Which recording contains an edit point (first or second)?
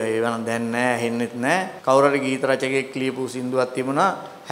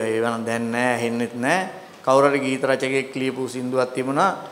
first